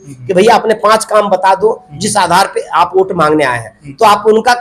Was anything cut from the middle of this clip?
no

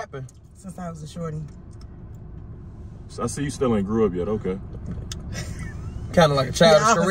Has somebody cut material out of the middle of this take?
no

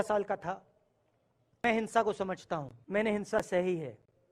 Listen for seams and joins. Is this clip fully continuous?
no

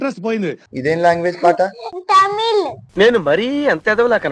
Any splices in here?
yes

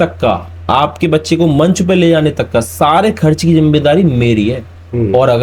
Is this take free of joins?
yes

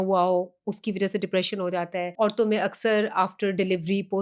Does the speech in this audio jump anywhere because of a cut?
yes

